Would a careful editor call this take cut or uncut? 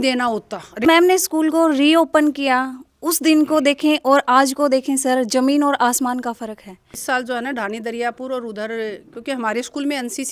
cut